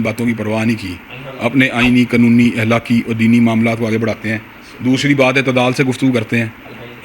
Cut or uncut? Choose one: uncut